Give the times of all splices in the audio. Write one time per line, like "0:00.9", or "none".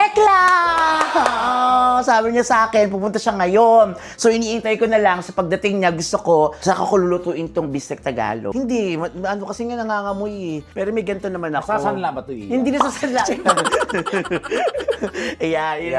0:08.5